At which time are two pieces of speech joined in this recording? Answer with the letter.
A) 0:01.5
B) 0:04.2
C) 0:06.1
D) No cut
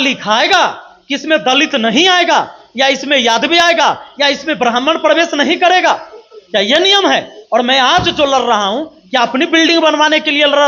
D